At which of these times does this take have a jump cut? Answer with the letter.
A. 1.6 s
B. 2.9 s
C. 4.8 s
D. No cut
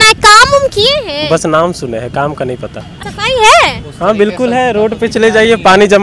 B